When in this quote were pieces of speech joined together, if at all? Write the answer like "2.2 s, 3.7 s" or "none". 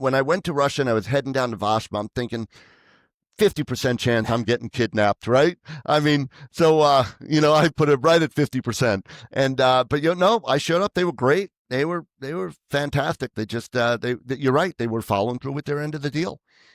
none

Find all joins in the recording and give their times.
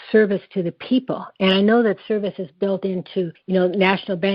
3.4 s

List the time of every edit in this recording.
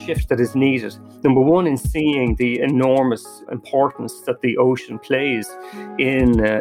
3.5 s

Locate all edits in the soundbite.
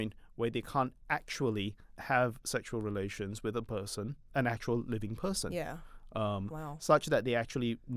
1.9 s, 4.2 s

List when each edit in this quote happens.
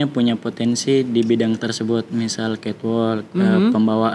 none

